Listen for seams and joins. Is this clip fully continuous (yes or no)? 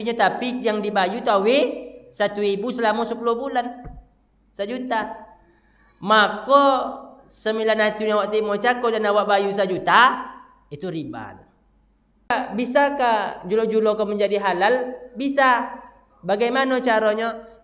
no